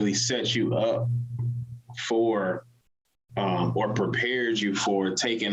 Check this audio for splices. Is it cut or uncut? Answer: uncut